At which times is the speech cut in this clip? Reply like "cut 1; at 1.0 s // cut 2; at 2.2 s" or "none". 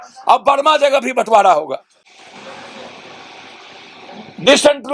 none